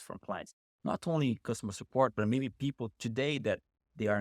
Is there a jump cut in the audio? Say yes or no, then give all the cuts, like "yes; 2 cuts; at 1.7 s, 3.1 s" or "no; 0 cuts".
no; 0 cuts